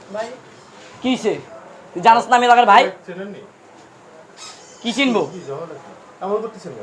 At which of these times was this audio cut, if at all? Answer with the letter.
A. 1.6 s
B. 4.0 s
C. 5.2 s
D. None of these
D